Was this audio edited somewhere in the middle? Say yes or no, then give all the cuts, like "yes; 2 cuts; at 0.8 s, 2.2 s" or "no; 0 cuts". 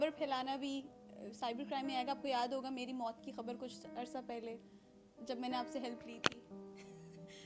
no; 0 cuts